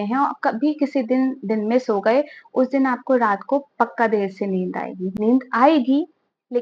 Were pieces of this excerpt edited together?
no; 0 cuts

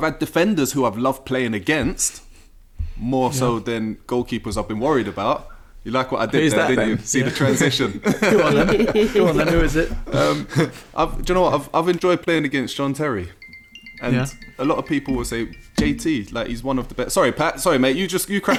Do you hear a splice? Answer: no; 0 cuts

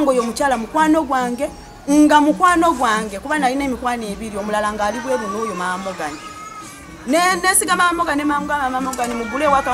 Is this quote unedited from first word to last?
yes; 0 cuts

